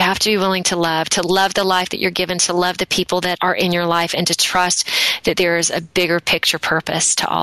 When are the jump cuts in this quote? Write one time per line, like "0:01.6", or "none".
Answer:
0:03.4